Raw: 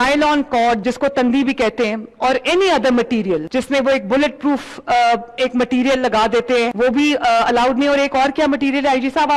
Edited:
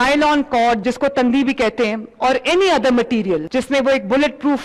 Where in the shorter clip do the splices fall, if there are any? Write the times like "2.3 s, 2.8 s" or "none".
none